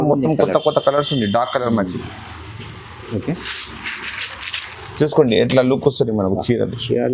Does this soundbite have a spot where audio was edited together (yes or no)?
no